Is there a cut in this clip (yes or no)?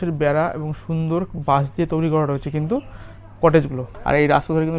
yes